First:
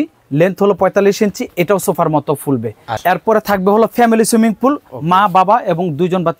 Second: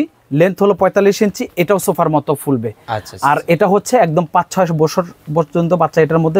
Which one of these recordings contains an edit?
first; 1 cut; at 2.9 s

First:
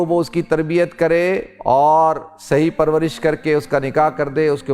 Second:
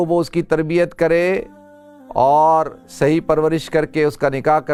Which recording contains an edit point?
first; 1 cut; at 1.5 s

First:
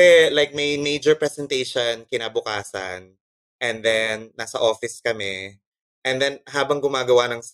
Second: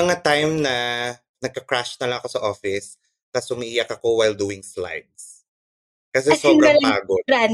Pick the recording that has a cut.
second; 1 cut; at 1.3 s

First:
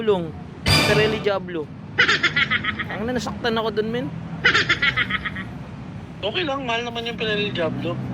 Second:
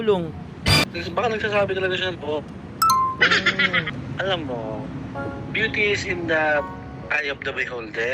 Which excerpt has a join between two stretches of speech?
second; 2 cuts; at 0.8 s, 3.9 s

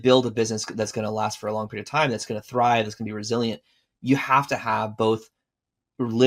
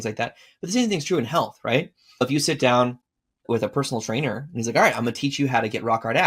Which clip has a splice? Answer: second; 2 cuts; at 2.2 s, 3.4 s

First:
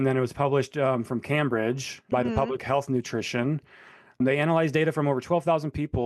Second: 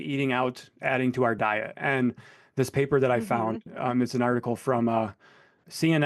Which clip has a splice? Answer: first; 1 cut; at 4.2 s

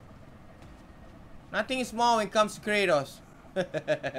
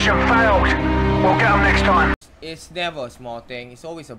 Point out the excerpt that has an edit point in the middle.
second; 1 cut; at 2.1 s

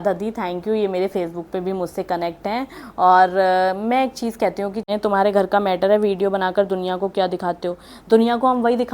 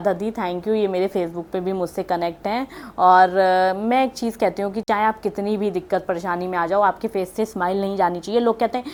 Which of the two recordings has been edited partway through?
first; 1 cut; at 4.9 s

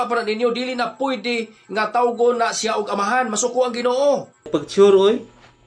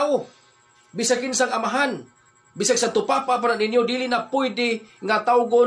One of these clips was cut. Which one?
first; 1 cut; at 4.5 s

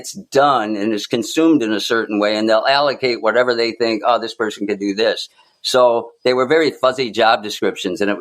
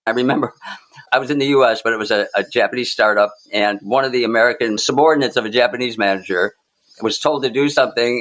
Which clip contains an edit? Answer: second; 2 cuts; at 1.0 s, 4.8 s

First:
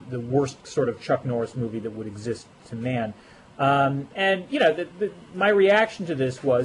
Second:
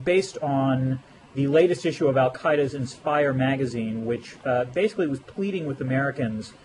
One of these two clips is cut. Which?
second; 1 cut; at 2.7 s

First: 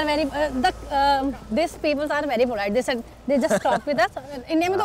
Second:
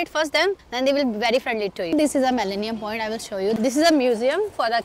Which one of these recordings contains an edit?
second; 2 cuts; at 1.9 s, 3.6 s

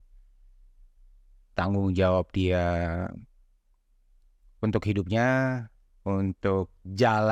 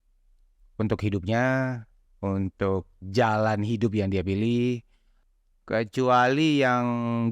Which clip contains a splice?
second; 1 cut; at 5.3 s

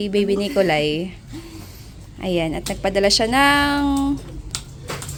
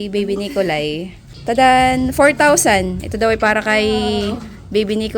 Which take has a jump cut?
second; 1 cut; at 1.5 s

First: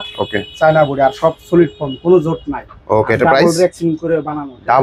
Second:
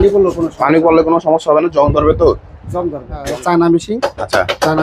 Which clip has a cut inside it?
second; 1 cut; at 3.1 s

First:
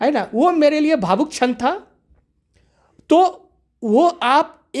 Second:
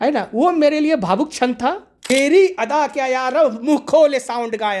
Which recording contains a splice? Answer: second; 1 cut; at 1.9 s

